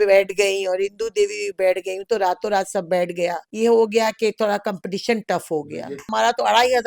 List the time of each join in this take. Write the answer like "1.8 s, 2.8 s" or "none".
3.4 s, 6.1 s